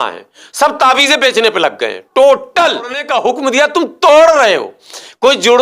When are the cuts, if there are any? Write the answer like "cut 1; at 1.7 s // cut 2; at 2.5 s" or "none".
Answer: cut 1; at 3.0 s